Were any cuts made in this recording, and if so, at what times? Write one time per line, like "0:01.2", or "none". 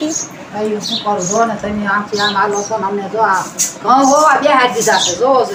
none